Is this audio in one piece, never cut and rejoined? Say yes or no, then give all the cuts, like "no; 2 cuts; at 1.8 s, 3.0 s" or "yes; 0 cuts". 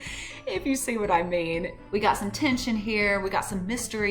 no; 1 cut; at 1.8 s